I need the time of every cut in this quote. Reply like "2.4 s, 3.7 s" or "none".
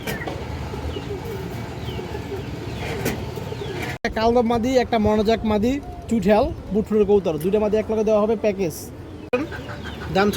4.0 s, 9.4 s